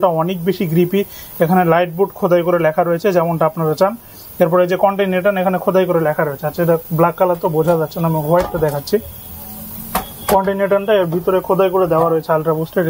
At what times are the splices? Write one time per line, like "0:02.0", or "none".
none